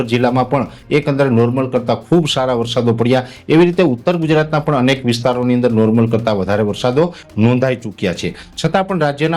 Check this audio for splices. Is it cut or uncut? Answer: uncut